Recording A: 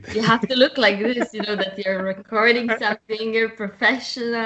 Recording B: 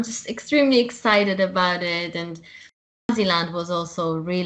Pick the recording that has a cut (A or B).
B